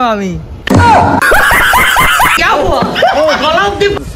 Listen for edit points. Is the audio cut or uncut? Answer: cut